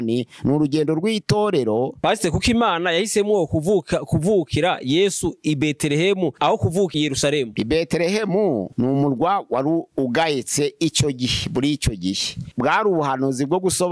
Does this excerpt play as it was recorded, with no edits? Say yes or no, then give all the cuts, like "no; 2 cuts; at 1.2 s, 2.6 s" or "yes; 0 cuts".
no; 2 cuts; at 2.0 s, 12.5 s